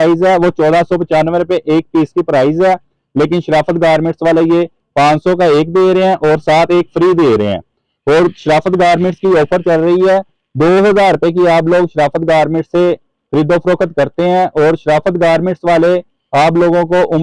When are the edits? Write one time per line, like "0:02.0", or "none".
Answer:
none